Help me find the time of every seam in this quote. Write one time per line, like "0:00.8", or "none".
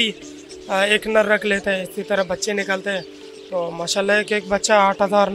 none